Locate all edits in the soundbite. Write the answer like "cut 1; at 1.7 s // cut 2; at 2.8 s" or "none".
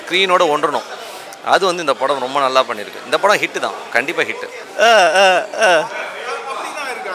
cut 1; at 4.6 s